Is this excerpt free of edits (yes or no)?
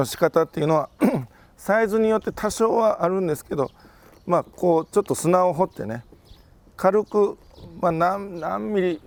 yes